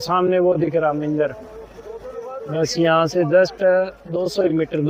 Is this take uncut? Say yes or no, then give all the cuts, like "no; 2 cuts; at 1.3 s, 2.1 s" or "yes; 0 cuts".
yes; 0 cuts